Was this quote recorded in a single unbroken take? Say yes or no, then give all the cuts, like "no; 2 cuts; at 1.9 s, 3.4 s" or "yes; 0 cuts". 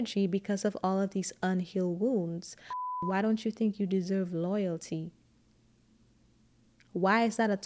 no; 1 cut; at 3.0 s